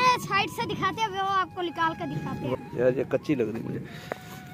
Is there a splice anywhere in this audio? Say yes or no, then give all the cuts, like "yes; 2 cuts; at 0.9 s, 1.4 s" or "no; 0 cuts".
yes; 1 cut; at 2.6 s